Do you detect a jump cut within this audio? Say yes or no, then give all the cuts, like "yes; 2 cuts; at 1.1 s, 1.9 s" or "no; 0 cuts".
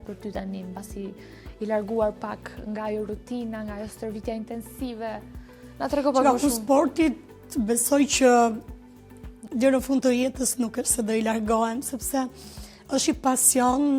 no; 0 cuts